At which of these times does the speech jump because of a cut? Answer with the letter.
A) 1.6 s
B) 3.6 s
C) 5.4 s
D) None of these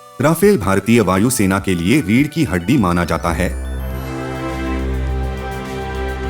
B